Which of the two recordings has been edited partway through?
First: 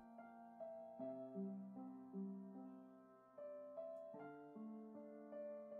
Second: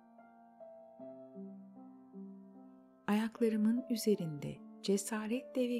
second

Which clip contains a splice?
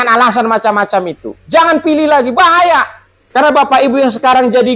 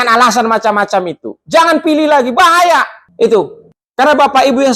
first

